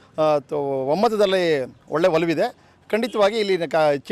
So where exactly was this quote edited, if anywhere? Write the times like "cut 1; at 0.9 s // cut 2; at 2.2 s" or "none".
none

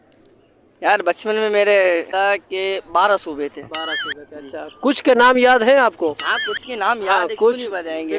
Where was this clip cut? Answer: cut 1; at 2.1 s

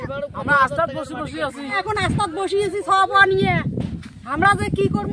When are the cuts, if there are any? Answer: cut 1; at 1.8 s

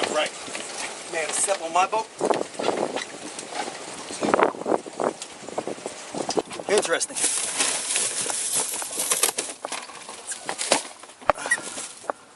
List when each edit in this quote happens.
cut 1; at 6.4 s

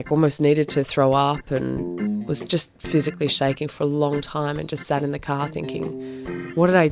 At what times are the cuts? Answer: none

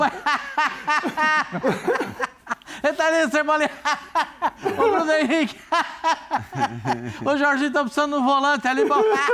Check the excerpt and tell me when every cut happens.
none

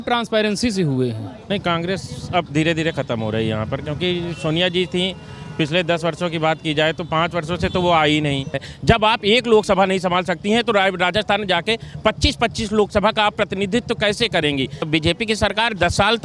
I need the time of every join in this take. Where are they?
cut 1; at 1.4 s // cut 2; at 8.6 s // cut 3; at 14.9 s

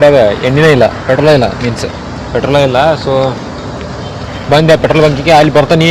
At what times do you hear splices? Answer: none

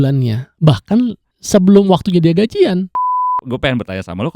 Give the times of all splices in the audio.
cut 1; at 1.3 s // cut 2; at 3.4 s

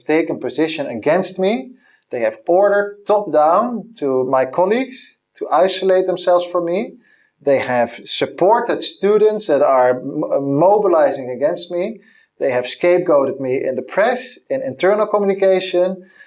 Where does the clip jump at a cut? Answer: none

